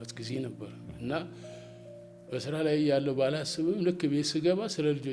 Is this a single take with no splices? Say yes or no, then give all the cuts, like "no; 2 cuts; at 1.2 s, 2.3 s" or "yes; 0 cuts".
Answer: yes; 0 cuts